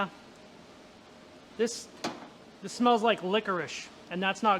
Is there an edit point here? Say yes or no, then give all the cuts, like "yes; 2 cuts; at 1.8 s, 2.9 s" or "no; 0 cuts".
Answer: no; 0 cuts